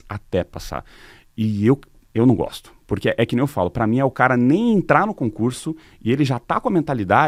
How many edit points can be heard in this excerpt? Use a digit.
0